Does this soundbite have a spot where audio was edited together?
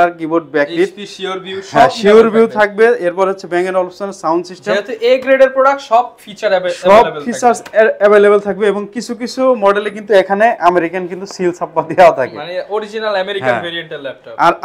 no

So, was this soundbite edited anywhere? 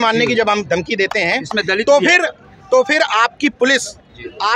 no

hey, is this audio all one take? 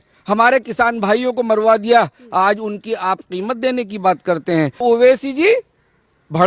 no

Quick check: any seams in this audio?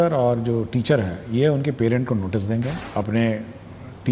yes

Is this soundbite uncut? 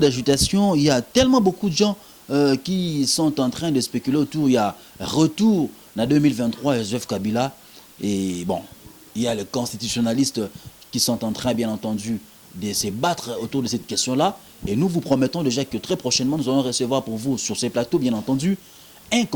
yes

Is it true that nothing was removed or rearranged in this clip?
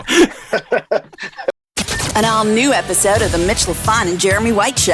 no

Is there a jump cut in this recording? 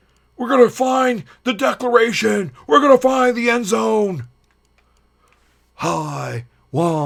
no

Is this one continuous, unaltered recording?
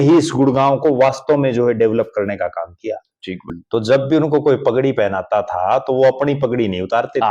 no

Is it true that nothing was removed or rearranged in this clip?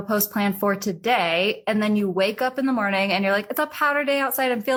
yes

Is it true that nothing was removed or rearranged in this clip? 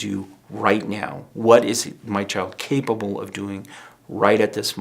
yes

